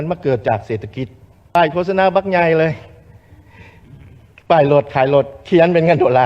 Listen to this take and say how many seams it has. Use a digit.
1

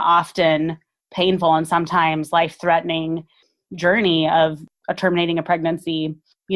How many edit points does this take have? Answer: 1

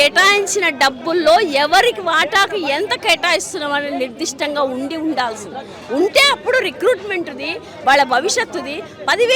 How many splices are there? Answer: 0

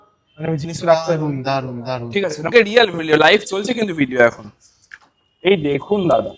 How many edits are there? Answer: 1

